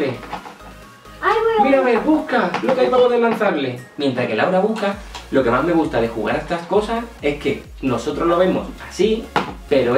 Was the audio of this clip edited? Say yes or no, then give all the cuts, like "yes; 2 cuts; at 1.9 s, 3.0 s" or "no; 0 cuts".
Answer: no; 0 cuts